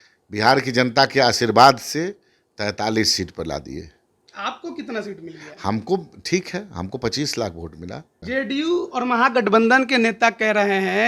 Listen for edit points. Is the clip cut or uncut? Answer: cut